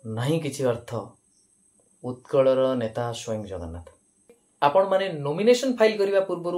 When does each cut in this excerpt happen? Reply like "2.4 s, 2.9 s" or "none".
4.4 s